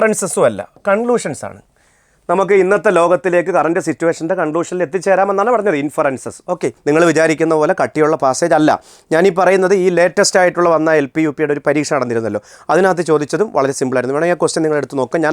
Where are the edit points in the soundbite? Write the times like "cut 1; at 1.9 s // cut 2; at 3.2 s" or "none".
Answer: cut 1; at 6.8 s